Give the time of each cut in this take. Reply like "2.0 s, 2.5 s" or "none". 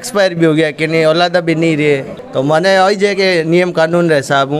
none